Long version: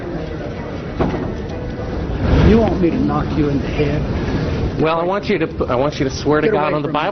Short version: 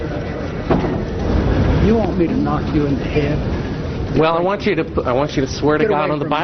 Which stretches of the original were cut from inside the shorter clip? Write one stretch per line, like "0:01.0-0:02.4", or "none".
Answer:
0:01.5-0:01.8